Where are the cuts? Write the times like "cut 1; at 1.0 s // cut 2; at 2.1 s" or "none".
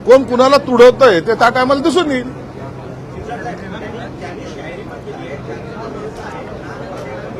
none